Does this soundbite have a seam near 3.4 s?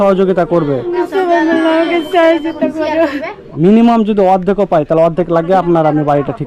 yes; 2 cuts; at 1.0 s, 3.4 s

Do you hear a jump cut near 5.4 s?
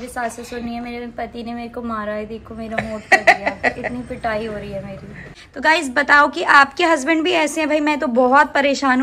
yes; 1 cut; at 5.4 s

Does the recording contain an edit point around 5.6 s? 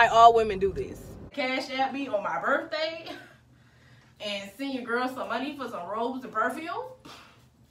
no; 1 cut; at 1.3 s

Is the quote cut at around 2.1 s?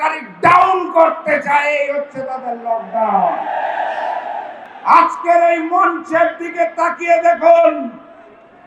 no; 1 cut; at 4.6 s

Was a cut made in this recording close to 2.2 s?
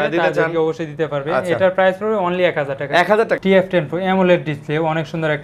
no; 1 cut; at 3.4 s

